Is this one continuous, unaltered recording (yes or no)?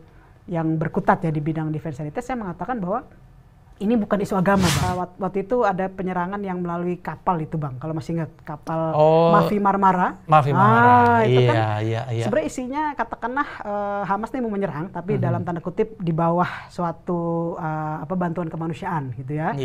no